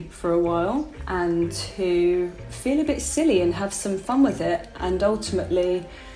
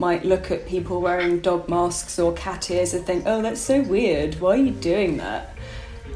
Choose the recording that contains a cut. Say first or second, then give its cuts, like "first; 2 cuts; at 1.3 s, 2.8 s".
first; 2 cuts; at 1.0 s, 2.5 s